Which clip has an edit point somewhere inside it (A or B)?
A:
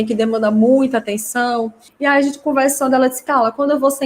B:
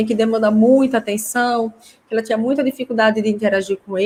A